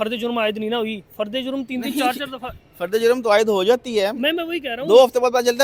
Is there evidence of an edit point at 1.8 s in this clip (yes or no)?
no